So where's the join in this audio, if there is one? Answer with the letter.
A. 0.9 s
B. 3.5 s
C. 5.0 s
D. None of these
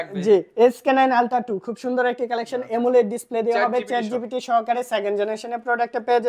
D